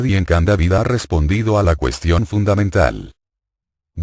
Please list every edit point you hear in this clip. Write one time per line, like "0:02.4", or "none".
0:02.0